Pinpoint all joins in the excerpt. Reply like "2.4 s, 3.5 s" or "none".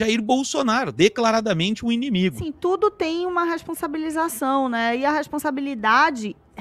2.5 s